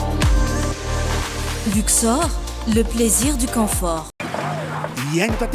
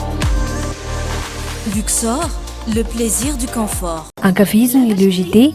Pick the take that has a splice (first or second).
first